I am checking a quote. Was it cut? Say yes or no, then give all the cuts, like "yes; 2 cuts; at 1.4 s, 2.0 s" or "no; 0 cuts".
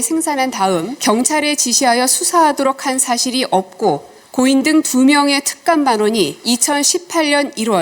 yes; 3 cuts; at 0.9 s, 4.2 s, 6.4 s